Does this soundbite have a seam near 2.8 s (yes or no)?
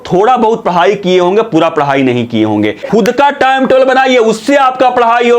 yes